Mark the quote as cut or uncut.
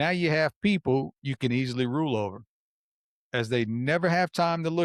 uncut